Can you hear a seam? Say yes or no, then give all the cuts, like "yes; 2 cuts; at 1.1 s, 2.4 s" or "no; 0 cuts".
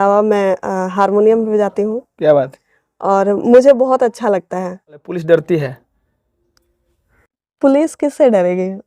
yes; 1 cut; at 5.1 s